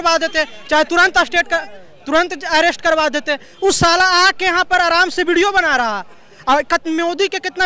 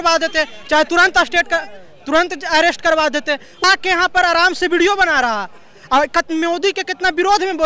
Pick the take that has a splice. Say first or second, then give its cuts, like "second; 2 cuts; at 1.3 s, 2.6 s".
second; 1 cut; at 3.6 s